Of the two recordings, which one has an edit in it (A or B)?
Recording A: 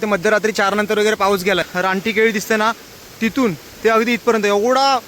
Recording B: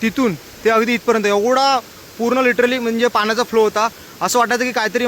A